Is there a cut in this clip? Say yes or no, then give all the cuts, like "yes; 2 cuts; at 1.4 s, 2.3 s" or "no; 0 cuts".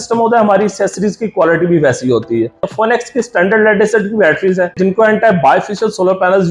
yes; 2 cuts; at 2.7 s, 4.8 s